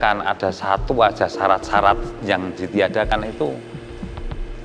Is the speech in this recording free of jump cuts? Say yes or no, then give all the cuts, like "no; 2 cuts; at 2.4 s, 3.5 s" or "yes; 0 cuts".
yes; 0 cuts